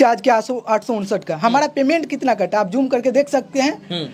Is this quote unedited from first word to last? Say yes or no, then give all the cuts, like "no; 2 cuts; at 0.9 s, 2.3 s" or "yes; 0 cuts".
yes; 0 cuts